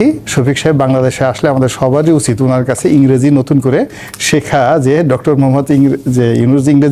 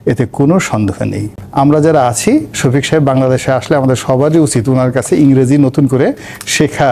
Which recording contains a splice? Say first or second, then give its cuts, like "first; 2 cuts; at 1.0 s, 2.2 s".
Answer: second; 1 cut; at 1.3 s